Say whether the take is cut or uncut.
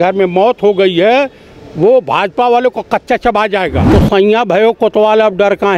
cut